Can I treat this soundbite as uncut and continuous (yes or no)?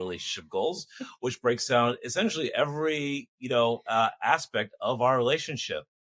yes